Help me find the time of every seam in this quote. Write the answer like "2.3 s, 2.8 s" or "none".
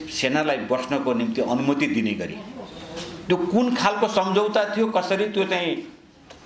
none